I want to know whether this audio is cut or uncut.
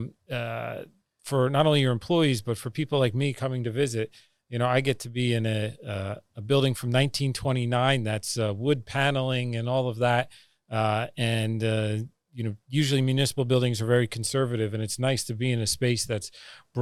uncut